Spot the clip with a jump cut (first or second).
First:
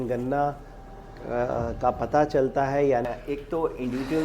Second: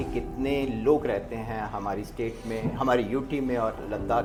first